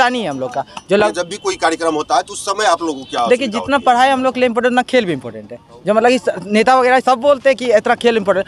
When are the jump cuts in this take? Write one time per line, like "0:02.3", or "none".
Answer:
0:01.1